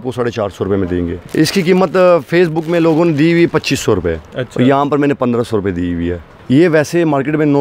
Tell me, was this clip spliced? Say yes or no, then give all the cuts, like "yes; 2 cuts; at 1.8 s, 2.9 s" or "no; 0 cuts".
yes; 2 cuts; at 1.2 s, 6.3 s